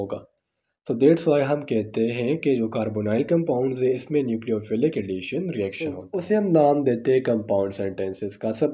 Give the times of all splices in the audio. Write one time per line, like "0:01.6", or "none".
0:06.0